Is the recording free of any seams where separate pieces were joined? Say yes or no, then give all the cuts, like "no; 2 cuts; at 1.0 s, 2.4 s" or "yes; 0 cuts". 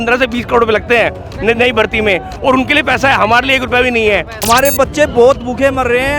no; 1 cut; at 4.3 s